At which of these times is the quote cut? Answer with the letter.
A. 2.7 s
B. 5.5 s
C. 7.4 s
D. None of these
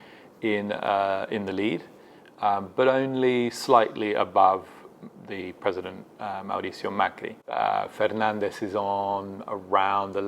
C